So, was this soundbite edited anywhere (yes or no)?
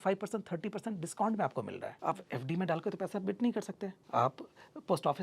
yes